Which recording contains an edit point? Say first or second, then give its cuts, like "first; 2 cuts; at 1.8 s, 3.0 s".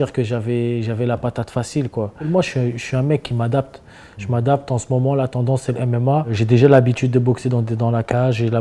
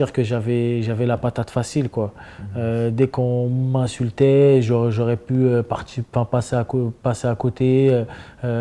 first; 2 cuts; at 2.3 s, 6.3 s